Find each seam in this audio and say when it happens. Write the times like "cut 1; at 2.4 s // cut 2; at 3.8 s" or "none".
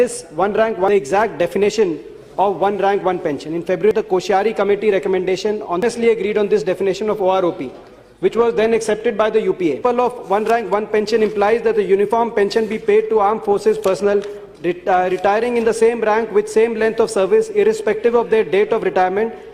cut 1; at 0.9 s // cut 2; at 3.9 s // cut 3; at 5.8 s // cut 4; at 9.8 s